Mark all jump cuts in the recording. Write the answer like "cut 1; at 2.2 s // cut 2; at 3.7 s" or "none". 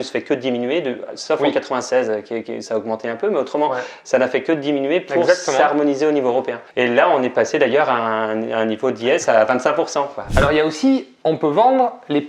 cut 1; at 10.3 s